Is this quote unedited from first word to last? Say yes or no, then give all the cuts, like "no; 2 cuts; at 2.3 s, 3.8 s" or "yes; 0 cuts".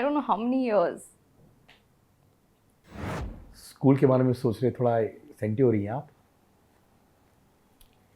no; 1 cut; at 3.1 s